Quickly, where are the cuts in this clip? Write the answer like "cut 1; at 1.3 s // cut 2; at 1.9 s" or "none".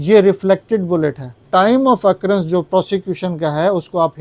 cut 1; at 1.3 s